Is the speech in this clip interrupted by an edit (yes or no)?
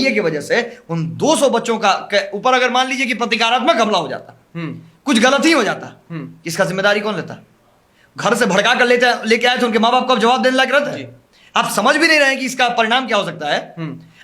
no